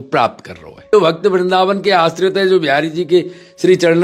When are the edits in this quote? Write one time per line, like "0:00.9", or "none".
0:00.9